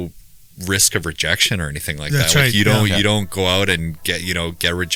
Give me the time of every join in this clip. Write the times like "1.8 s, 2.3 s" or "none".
none